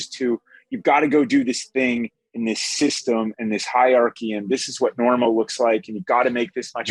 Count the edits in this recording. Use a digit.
0